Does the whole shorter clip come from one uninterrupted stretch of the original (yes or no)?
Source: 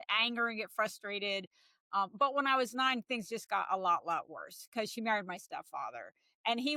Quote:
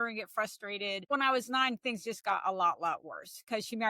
no